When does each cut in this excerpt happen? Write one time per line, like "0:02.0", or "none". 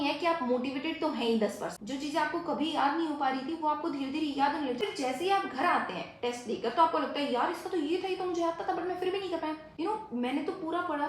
0:01.7
0:04.8
0:09.7